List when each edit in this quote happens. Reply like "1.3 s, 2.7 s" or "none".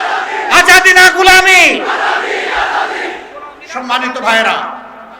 none